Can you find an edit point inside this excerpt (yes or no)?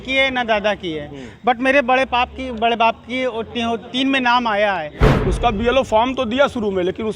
yes